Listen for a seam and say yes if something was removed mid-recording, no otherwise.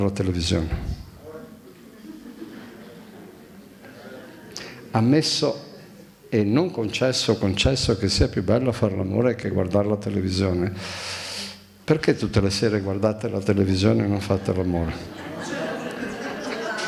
no